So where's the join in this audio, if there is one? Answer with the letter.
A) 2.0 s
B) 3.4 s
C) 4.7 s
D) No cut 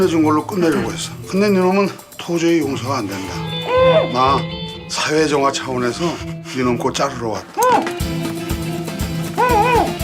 B